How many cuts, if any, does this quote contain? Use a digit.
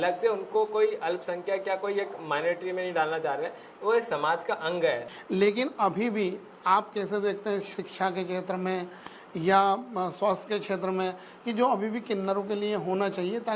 1